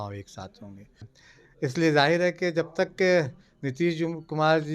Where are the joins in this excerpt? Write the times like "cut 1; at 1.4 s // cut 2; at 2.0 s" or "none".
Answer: cut 1; at 1.1 s